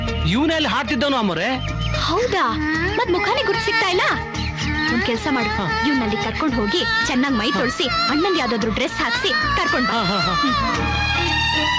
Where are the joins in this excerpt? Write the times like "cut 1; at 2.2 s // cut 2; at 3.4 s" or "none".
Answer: none